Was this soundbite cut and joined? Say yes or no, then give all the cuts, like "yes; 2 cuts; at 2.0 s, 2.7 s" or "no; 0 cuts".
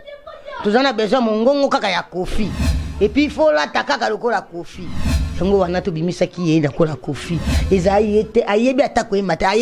no; 0 cuts